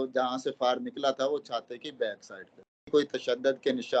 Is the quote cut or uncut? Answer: cut